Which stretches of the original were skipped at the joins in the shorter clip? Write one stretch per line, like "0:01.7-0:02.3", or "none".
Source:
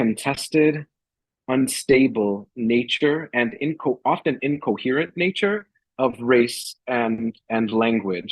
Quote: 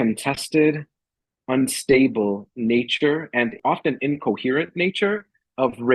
0:03.6-0:04.0